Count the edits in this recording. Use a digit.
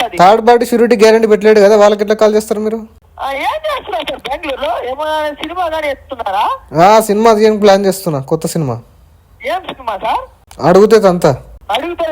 1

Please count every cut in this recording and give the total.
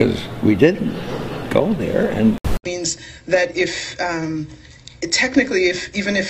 1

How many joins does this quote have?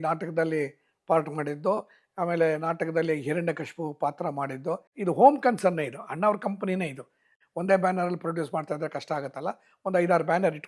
1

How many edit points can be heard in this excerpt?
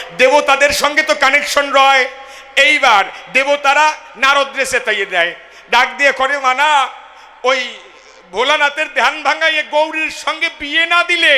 0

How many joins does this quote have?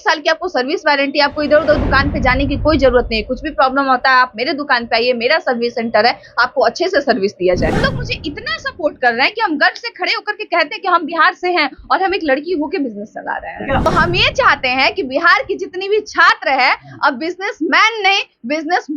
2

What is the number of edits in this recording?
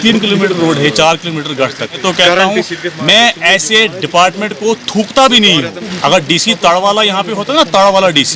2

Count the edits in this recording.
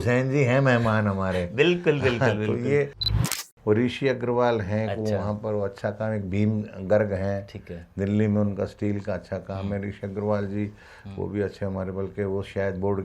1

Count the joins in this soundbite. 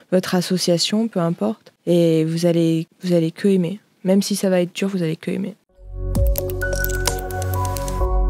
1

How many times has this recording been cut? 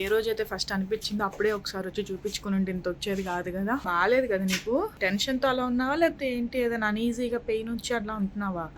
2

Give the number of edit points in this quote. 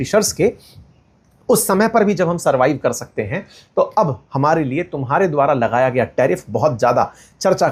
0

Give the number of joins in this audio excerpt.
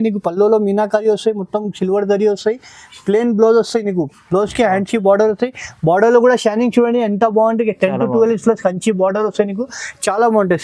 0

